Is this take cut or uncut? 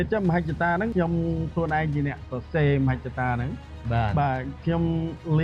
cut